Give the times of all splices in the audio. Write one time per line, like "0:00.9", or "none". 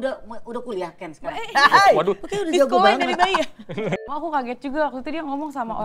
0:04.1